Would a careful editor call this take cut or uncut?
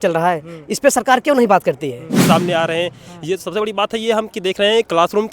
cut